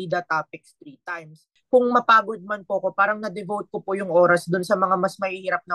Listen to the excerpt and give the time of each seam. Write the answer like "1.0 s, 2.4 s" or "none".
1.5 s